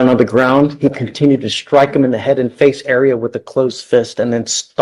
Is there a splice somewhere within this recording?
no; 0 cuts

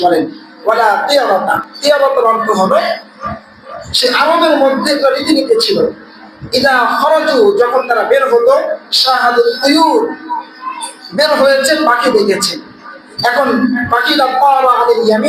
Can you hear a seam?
yes; 1 cut; at 1.7 s

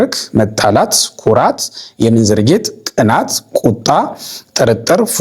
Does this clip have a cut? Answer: no; 0 cuts

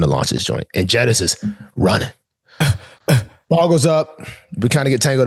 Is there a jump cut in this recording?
no; 0 cuts

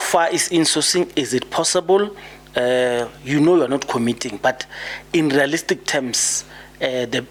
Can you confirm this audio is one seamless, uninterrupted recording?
yes; 0 cuts

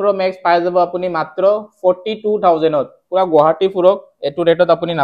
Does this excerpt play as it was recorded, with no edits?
yes; 0 cuts

